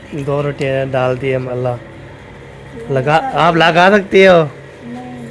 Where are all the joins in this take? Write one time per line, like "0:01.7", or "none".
0:01.5